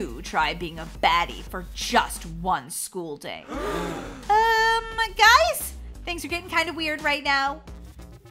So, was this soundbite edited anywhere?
no; 0 cuts

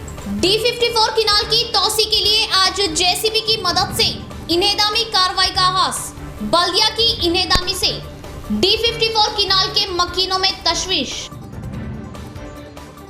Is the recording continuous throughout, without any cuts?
yes; 0 cuts

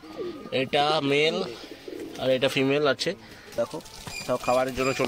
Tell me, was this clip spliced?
yes; 1 cut; at 3.6 s

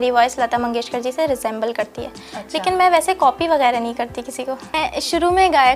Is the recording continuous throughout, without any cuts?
no; 1 cut; at 4.7 s

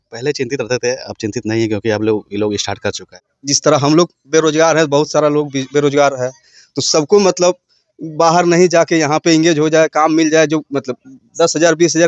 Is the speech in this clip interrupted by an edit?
yes; 1 cut; at 3.4 s

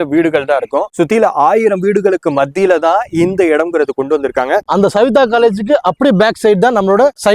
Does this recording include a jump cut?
yes; 1 cut; at 4.6 s

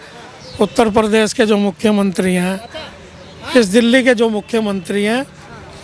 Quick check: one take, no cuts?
yes; 0 cuts

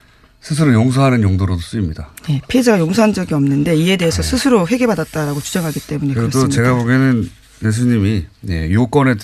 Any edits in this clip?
no; 0 cuts

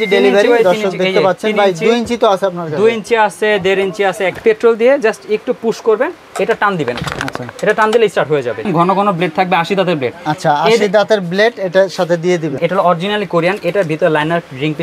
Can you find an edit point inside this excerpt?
yes; 3 cuts; at 4.4 s, 8.6 s, 12.6 s

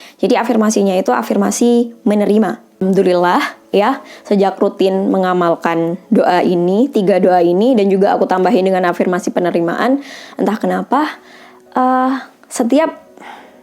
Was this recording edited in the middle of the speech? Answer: yes; 1 cut; at 2.8 s

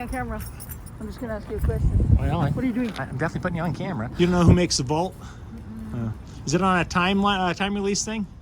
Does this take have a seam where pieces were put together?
yes; 1 cut; at 4.0 s

